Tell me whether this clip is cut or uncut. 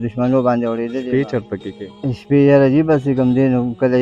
cut